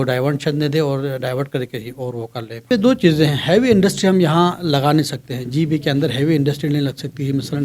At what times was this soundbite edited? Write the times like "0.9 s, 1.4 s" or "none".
2.6 s

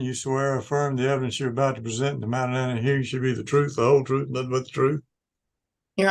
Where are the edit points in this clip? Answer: none

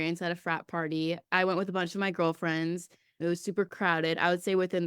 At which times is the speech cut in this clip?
3.1 s

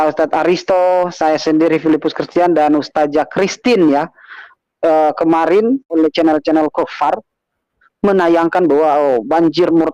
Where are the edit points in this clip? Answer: 5.9 s

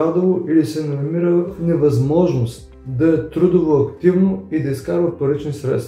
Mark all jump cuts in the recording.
1.6 s

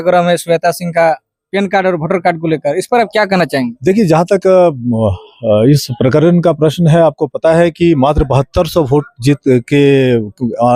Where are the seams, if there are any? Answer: none

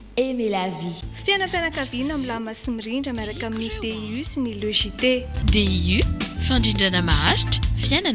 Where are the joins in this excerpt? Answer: 1.1 s

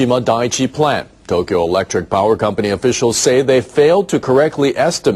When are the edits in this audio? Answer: 1.1 s

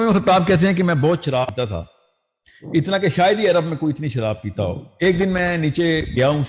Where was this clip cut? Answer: 1.5 s

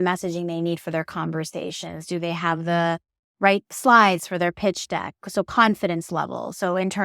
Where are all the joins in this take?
none

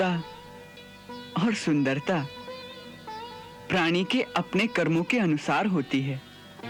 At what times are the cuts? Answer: none

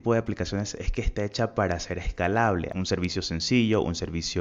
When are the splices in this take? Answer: 2.7 s

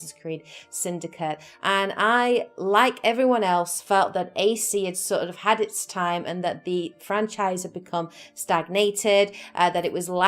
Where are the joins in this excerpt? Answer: 3.4 s

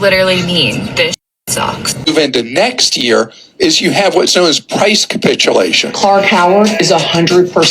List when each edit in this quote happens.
2.0 s

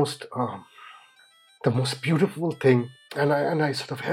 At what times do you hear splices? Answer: 3.0 s

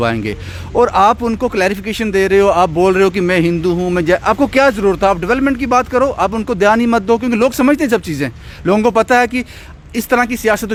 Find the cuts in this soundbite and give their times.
none

